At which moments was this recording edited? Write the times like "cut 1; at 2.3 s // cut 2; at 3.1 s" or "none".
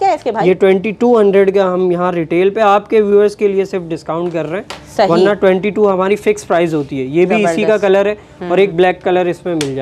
none